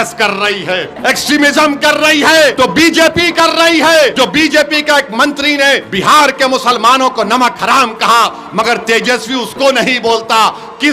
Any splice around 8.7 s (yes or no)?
no